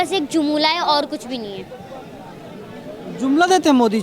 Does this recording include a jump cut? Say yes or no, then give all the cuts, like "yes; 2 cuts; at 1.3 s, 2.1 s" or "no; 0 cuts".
no; 0 cuts